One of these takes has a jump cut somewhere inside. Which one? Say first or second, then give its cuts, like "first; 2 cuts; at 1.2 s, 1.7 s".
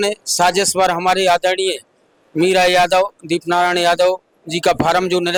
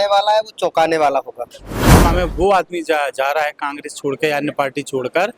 second; 1 cut; at 1.9 s